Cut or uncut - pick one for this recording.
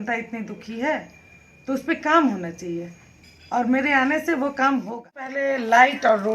cut